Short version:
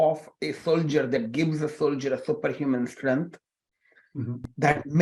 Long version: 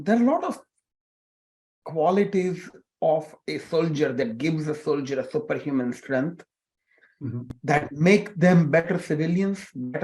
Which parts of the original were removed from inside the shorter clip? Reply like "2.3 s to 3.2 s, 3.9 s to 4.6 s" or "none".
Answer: none